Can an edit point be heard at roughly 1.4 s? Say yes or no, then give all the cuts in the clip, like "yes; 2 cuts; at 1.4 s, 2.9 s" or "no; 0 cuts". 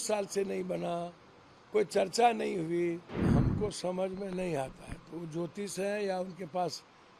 no; 1 cut; at 3.3 s